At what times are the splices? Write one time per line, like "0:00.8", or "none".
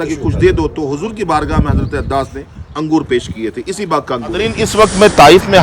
0:04.6

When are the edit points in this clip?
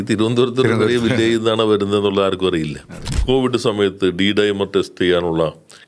0:03.1

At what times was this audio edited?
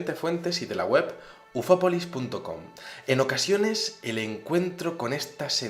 none

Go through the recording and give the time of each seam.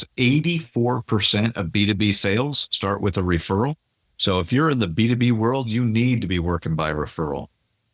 none

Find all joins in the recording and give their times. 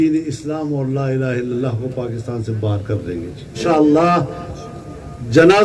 0:03.6

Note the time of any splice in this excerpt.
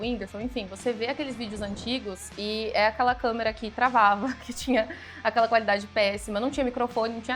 none

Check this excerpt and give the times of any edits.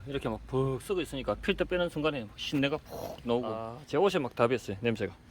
0:03.7

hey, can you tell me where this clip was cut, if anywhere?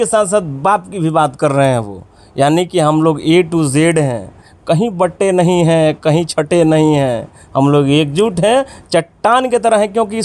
none

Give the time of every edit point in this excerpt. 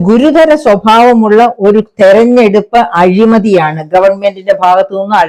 none

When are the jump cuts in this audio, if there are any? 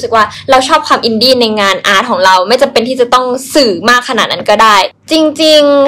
0:04.9

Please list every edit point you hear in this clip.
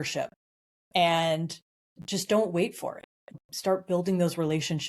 0:03.4

